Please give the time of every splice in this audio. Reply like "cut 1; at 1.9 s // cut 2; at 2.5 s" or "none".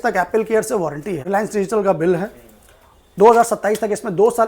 cut 1; at 1.2 s